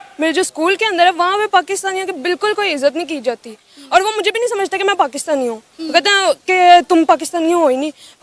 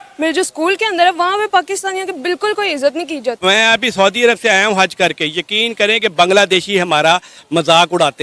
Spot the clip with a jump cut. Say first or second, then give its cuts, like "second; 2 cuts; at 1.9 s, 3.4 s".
second; 1 cut; at 3.4 s